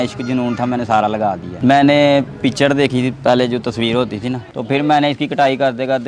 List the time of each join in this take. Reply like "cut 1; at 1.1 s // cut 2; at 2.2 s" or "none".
cut 1; at 4.4 s